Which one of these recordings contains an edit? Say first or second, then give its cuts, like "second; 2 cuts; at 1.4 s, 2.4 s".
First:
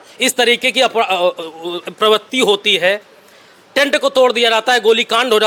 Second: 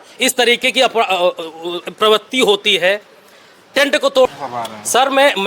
second; 1 cut; at 4.3 s